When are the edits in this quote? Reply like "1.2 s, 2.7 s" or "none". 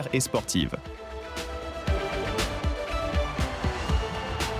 0.9 s